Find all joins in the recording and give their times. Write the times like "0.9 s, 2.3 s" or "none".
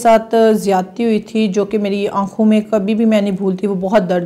none